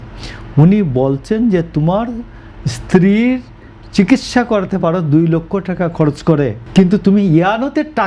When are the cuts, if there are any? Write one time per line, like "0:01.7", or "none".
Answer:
0:06.6